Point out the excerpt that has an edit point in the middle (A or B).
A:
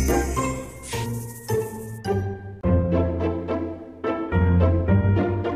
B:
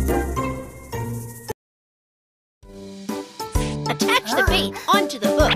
A